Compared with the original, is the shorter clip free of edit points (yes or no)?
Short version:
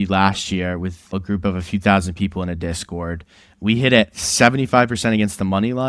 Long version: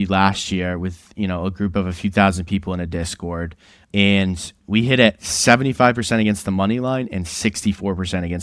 no